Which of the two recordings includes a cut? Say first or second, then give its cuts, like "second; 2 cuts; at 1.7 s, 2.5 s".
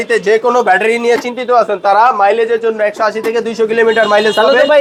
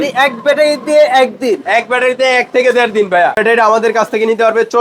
second; 1 cut; at 3.4 s